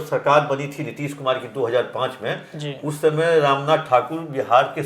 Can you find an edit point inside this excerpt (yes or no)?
no